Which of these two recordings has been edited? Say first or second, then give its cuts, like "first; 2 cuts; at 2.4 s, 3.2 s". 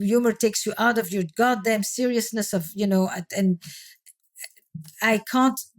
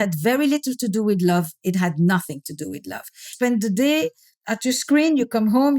second; 1 cut; at 3.3 s